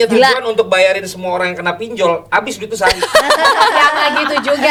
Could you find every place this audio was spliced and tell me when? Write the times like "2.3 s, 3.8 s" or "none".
none